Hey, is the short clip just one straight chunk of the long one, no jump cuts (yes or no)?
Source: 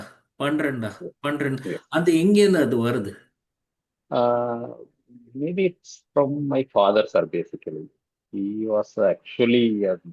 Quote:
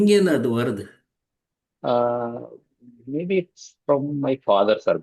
yes